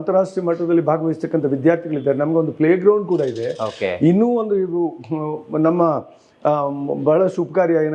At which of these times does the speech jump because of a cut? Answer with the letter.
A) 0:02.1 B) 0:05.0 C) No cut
C